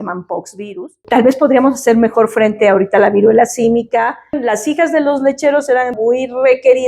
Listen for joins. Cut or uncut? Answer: cut